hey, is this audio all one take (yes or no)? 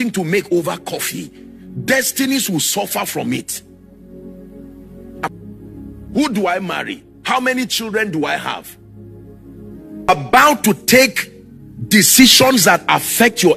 no